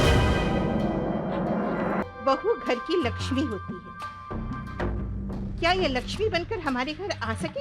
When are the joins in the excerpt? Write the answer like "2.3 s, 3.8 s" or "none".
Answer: 2.0 s

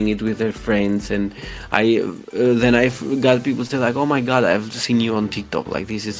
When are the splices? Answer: none

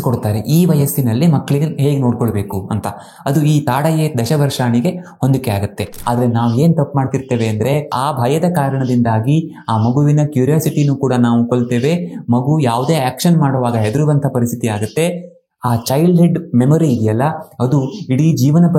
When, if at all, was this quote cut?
5.9 s, 7.9 s

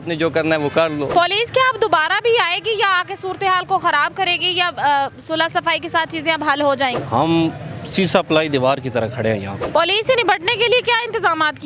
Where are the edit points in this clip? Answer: 1.1 s, 9.6 s

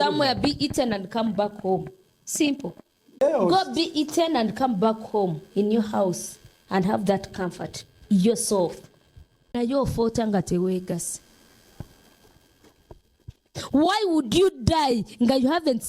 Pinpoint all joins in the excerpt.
3.2 s, 9.5 s

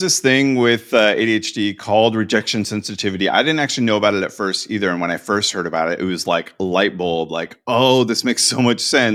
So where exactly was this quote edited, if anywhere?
none

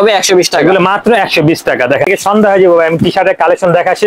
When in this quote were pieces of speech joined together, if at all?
2.1 s

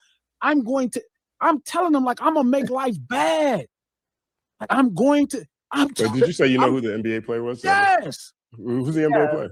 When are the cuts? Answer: none

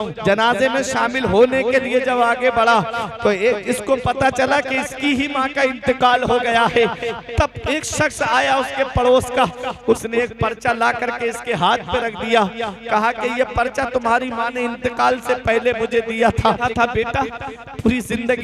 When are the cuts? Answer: 16.6 s

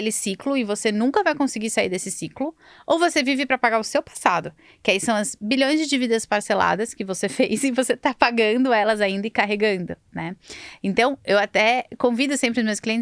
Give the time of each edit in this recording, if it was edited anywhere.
none

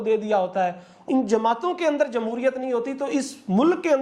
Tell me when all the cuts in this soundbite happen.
0.9 s

